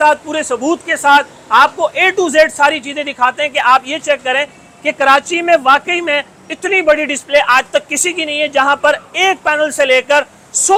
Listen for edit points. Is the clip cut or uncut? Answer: uncut